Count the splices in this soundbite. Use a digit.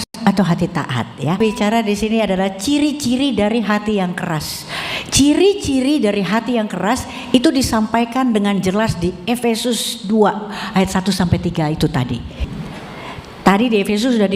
2